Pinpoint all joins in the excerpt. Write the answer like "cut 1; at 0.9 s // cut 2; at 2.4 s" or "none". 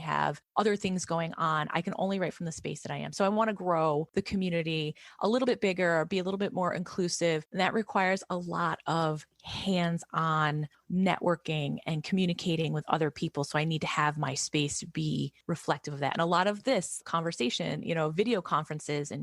none